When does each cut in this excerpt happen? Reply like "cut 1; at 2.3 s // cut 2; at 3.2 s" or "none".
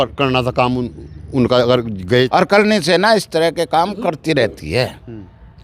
cut 1; at 2.3 s